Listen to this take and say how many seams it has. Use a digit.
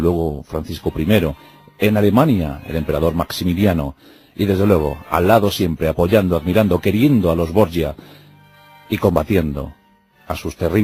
0